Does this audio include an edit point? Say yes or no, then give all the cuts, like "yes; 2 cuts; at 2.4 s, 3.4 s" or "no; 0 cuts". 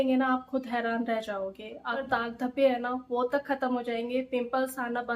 yes; 1 cut; at 2.0 s